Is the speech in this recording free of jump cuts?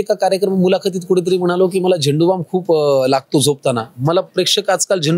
yes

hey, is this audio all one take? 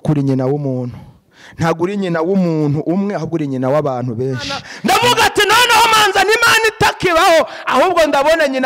no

